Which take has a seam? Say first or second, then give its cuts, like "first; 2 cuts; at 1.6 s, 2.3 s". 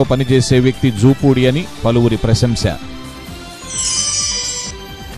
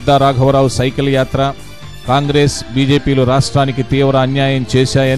first; 1 cut; at 2.8 s